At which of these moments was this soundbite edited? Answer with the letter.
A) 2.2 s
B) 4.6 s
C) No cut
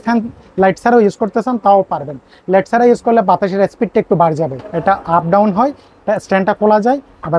B